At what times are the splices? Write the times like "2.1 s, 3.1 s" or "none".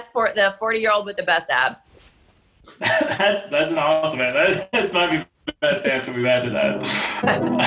none